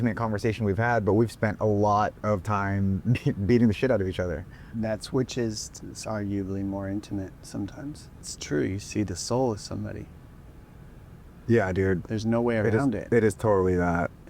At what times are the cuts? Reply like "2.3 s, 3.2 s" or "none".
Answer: 8.2 s